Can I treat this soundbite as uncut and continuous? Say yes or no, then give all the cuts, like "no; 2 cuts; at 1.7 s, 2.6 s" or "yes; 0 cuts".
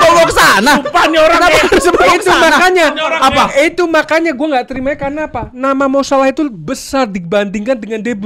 yes; 0 cuts